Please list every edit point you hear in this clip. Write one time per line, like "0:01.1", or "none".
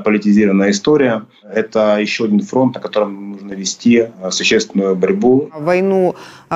0:01.5
0:05.6